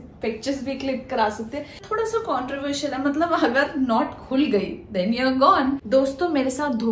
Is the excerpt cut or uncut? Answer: cut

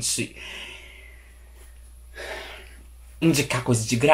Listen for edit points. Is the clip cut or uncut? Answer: uncut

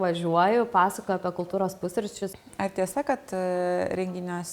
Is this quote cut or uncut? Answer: cut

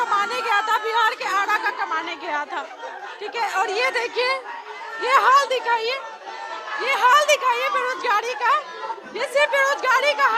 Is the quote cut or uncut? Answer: uncut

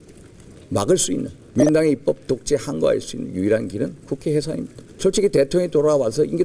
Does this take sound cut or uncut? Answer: cut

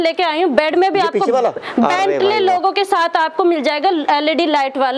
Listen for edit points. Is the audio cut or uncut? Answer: uncut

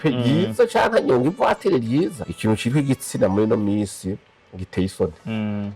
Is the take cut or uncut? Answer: cut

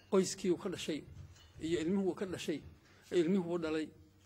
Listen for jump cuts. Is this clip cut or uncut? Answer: uncut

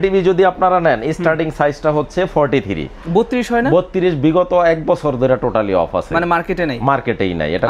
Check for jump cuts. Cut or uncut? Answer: uncut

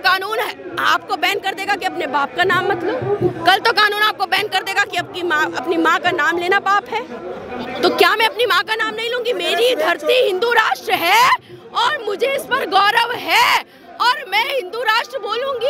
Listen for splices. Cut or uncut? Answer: uncut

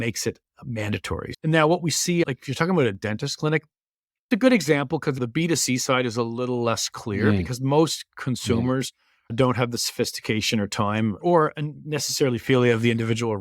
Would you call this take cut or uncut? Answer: cut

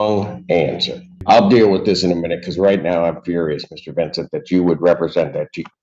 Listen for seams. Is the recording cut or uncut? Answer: cut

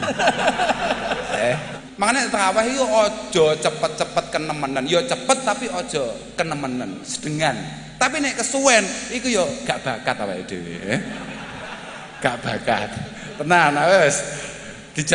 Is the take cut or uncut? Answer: cut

